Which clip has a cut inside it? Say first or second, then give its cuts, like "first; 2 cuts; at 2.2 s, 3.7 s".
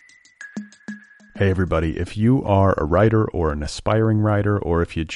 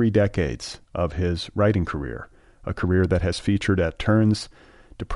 first; 1 cut; at 0.9 s